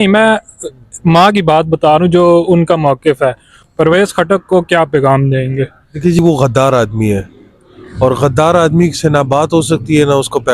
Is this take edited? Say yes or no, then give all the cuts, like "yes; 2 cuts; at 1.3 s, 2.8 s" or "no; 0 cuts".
yes; 2 cuts; at 3.5 s, 6.2 s